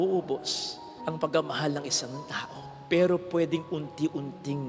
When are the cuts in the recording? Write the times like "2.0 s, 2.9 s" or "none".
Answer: none